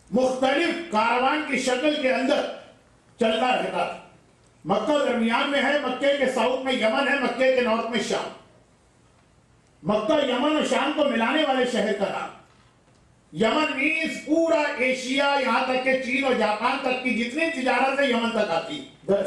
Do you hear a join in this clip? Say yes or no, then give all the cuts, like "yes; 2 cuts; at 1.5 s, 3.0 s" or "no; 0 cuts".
yes; 1 cut; at 9.5 s